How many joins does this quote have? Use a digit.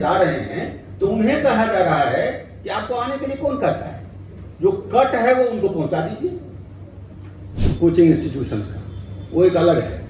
1